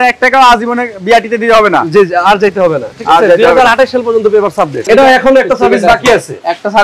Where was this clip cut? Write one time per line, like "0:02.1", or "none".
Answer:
0:04.9

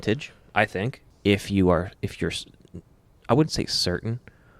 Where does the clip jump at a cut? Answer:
0:01.0

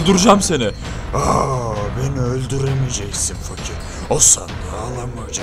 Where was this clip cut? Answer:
none

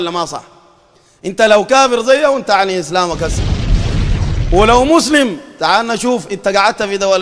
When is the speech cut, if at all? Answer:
none

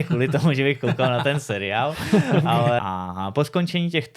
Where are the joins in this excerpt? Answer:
0:02.8

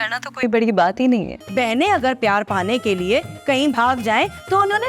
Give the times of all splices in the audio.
0:01.4

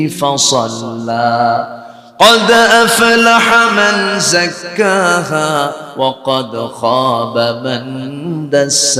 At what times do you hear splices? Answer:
none

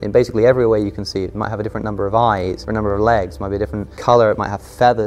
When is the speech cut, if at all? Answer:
0:02.6
0:03.9

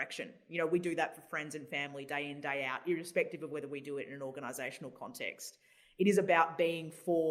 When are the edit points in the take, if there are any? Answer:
none

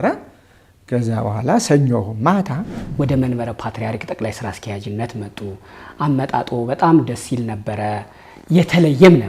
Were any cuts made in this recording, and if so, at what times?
0:02.7

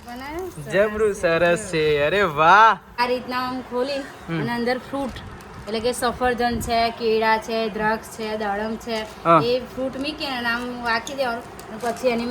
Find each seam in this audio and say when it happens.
0:03.0

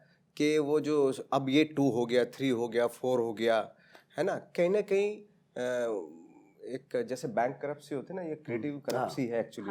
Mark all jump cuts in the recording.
none

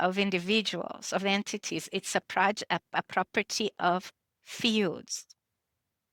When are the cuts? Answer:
none

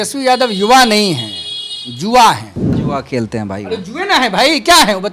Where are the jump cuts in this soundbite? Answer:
0:02.8

